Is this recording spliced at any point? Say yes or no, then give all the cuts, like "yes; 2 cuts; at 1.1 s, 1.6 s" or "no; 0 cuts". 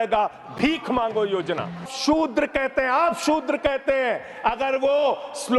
yes; 1 cut; at 1.9 s